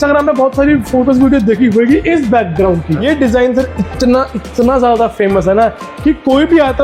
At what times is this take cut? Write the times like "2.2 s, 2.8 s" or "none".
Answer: 3.0 s